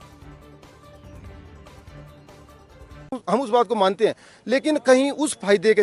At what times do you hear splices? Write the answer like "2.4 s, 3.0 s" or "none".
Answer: 3.2 s

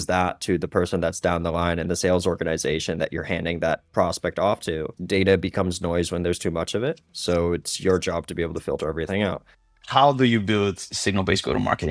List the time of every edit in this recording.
4.9 s, 9.7 s

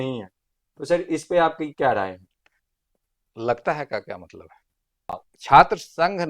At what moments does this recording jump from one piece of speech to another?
5.3 s

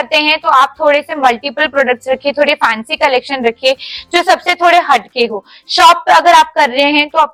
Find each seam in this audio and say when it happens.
none

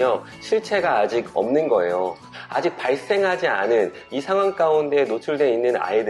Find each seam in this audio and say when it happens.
2.3 s

